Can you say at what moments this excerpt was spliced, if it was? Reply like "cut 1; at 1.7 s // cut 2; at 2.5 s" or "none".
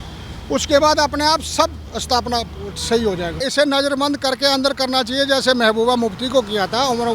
cut 1; at 1.9 s // cut 2; at 3.5 s